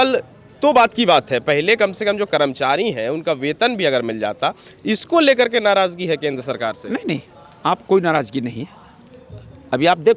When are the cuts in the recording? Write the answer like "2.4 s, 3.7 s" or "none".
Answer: none